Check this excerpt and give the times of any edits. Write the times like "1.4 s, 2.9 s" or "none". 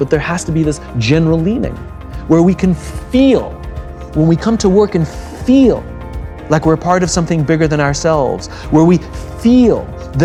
none